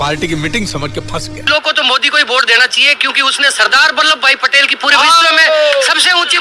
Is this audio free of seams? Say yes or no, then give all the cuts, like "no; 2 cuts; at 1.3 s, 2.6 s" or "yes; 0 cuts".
no; 1 cut; at 1.4 s